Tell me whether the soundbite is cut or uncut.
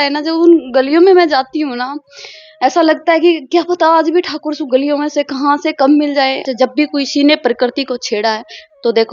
cut